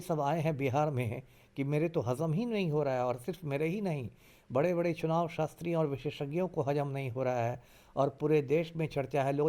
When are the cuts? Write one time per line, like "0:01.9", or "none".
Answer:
none